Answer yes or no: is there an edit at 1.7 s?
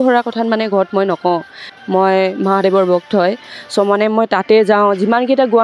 yes